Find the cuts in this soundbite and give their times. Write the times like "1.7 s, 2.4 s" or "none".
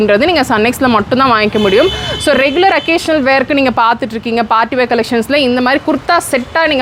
none

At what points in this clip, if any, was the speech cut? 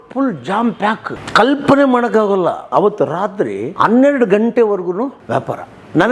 1.1 s, 2.7 s, 3.6 s, 5.2 s

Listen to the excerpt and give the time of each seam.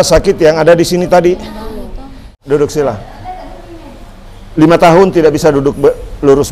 2.4 s

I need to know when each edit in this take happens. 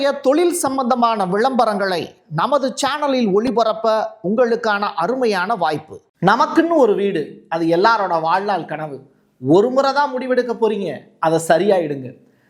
6.1 s

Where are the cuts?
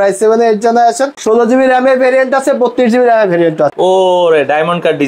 1.1 s, 3.7 s

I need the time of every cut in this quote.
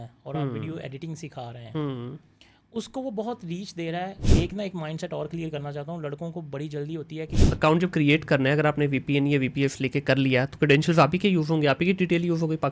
4.2 s, 7.4 s

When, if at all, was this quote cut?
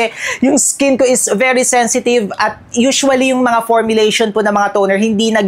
none

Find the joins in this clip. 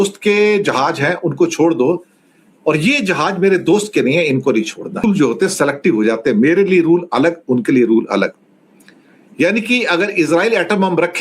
5.0 s

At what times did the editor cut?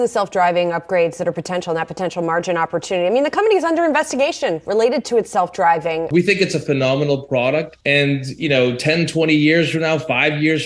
6.1 s, 7.8 s

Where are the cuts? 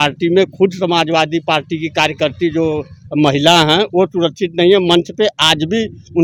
none

